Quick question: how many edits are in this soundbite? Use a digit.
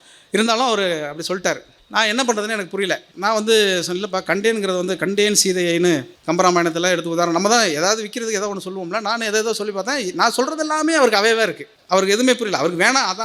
4